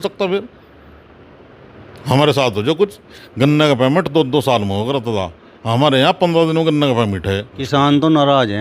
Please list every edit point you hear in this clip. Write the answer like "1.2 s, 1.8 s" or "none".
3.1 s, 7.5 s